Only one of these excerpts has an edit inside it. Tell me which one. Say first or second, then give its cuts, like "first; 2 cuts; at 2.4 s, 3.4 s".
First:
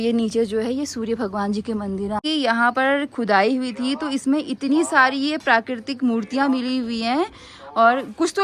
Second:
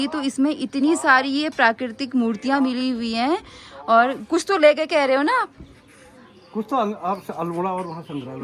first; 1 cut; at 2.2 s